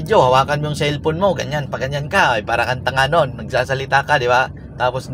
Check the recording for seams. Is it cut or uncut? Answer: uncut